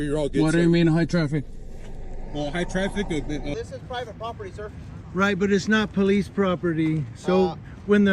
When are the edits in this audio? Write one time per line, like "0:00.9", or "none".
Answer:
0:03.5